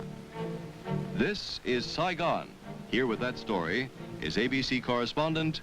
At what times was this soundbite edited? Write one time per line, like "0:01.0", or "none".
0:04.5